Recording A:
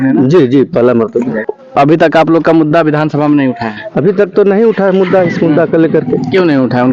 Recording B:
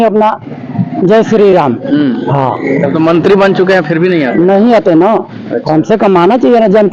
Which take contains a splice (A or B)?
A